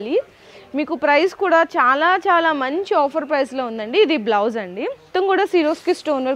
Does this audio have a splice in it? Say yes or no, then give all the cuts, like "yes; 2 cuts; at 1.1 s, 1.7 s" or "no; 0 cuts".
yes; 1 cut; at 5.1 s